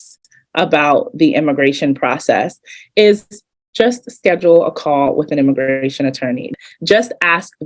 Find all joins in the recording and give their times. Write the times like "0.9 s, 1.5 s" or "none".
6.5 s